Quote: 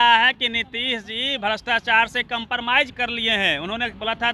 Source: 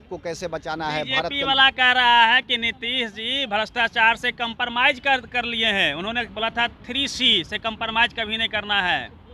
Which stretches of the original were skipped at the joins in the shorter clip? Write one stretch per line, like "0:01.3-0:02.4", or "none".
0:05.0-0:05.3